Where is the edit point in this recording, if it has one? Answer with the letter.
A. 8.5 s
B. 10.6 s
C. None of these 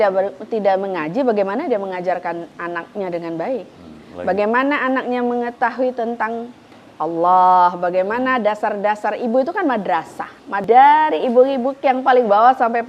B